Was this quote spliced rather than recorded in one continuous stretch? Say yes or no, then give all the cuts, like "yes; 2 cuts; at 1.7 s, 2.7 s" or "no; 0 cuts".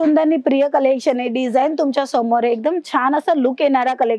no; 0 cuts